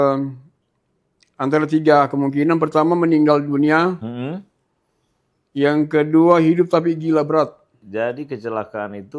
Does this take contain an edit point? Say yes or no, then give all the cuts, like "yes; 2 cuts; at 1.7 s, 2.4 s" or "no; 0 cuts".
yes; 1 cut; at 7.8 s